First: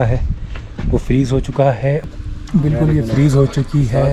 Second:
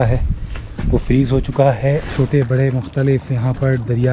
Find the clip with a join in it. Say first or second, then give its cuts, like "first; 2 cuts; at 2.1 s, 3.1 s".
second; 1 cut; at 2.1 s